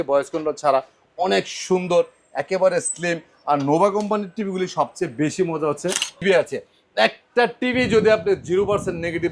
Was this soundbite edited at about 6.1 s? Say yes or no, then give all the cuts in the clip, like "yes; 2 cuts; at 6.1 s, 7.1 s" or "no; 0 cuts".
yes; 1 cut; at 6.1 s